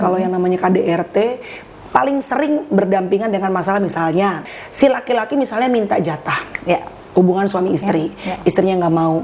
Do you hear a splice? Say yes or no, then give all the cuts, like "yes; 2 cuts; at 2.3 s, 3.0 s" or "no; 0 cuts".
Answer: yes; 1 cut; at 4.5 s